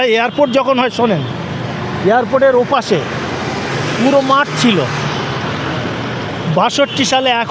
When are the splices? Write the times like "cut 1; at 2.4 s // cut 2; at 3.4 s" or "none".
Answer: none

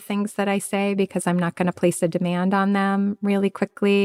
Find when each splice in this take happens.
none

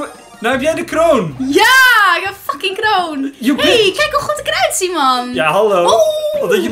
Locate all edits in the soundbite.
none

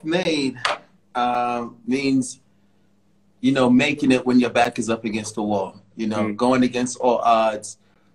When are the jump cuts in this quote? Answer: none

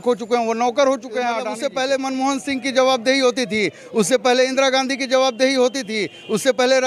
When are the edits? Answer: cut 1; at 1.6 s

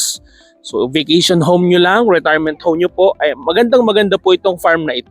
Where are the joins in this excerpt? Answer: none

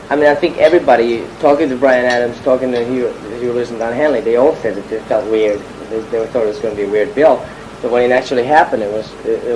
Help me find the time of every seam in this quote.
cut 1; at 4.3 s

